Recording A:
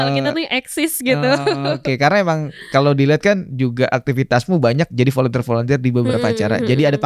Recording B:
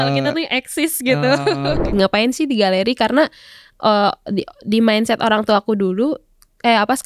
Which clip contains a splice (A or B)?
B